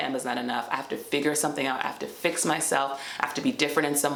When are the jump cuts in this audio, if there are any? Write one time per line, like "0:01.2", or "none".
none